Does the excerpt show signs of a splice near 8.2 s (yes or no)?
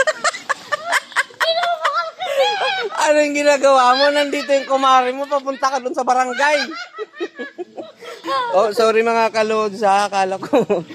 yes